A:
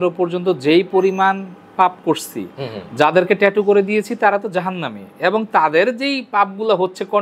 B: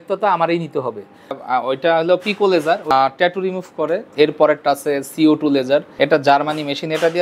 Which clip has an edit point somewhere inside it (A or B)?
B